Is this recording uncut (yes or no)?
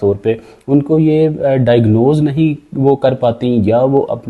yes